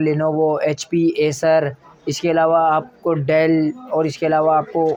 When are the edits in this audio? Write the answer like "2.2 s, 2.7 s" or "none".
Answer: none

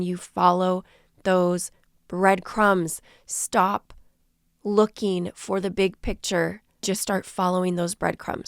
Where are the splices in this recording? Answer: 6.8 s

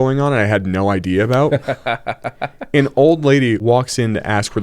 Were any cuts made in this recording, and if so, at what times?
3.6 s

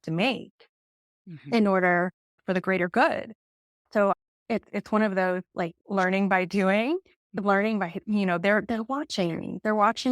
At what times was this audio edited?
2.4 s, 4.1 s

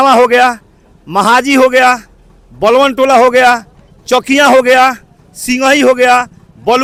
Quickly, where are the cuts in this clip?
none

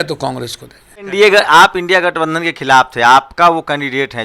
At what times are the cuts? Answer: 1.0 s

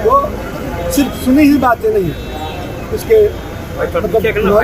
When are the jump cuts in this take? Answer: none

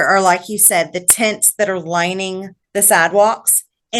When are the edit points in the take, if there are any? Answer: 2.5 s

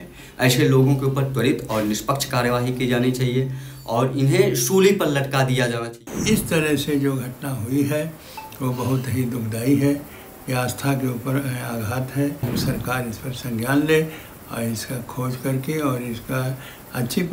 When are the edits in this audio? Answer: 6.1 s, 12.5 s

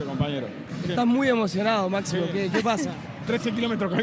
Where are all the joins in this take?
none

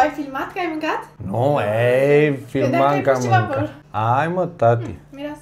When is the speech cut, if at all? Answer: 1.1 s, 3.8 s

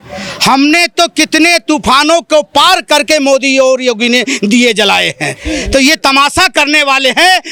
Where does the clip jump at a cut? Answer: none

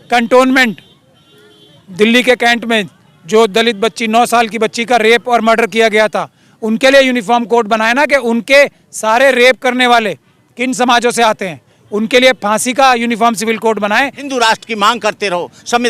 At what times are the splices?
14.2 s

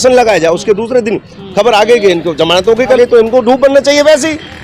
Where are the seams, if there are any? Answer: 3.0 s

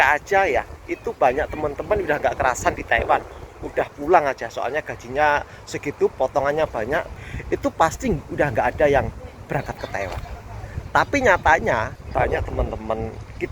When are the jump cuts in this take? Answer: 7.1 s, 12.0 s

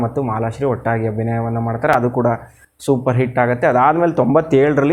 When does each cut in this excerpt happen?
none

